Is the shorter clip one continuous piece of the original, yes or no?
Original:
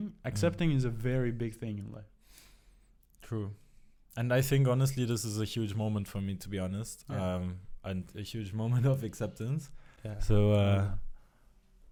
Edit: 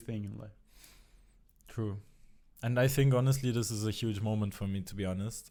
yes